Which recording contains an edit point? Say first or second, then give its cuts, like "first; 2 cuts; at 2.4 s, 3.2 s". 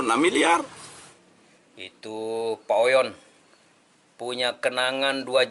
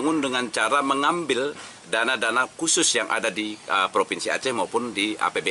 first; 1 cut; at 1.1 s